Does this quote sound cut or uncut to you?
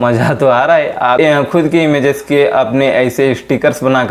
cut